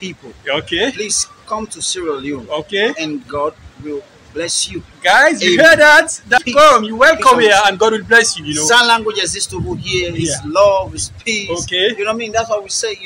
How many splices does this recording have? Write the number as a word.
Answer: zero